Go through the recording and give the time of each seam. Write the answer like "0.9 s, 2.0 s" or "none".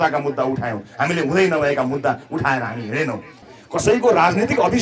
3.3 s